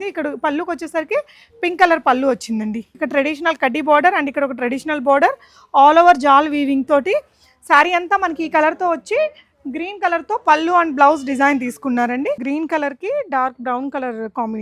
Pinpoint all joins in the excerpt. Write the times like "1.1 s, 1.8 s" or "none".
3.0 s, 12.4 s